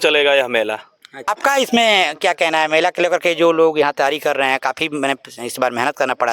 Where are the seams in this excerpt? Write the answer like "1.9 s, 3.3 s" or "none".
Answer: 1.3 s